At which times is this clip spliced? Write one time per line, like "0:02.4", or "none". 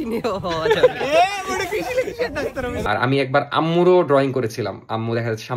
0:02.8